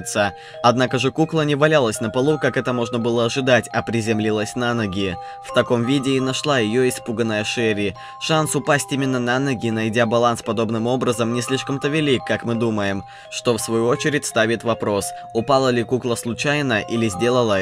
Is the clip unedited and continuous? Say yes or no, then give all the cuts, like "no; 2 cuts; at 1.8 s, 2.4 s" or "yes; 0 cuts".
no; 1 cut; at 8.6 s